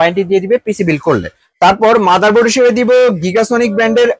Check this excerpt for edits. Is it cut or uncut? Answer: uncut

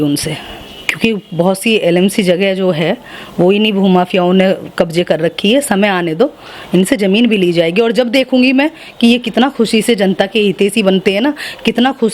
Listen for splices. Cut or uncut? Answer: uncut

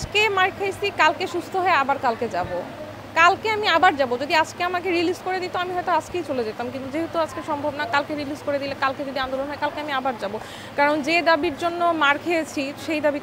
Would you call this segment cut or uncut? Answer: uncut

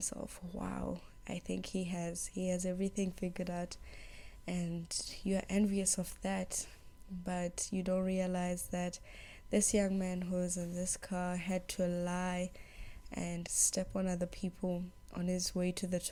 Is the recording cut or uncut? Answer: uncut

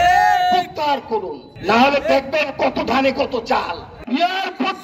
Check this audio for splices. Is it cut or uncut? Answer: cut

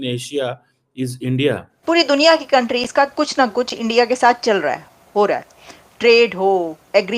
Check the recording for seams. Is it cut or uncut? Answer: cut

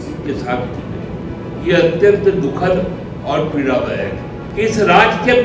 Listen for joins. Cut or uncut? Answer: cut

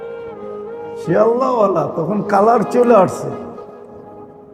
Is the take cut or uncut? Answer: cut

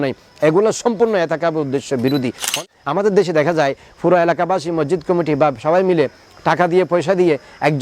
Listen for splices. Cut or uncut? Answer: cut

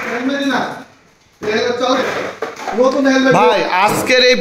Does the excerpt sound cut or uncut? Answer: cut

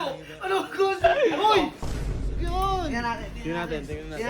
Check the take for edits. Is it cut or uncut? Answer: cut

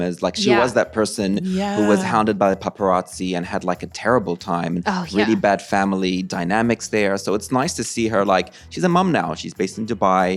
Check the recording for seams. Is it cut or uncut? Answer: uncut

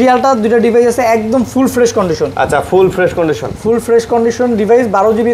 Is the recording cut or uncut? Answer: uncut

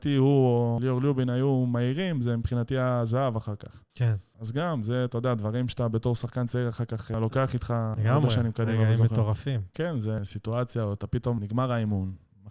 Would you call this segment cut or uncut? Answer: cut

